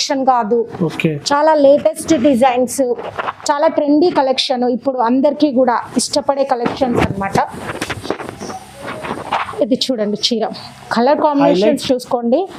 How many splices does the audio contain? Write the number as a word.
zero